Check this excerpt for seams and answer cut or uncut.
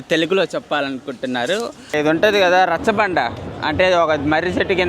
cut